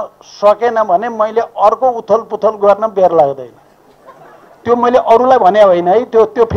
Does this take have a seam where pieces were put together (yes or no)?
no